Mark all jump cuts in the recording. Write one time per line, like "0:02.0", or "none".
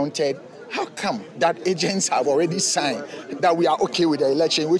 0:01.4